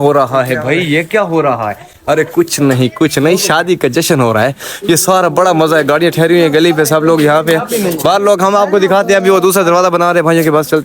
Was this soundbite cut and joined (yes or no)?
no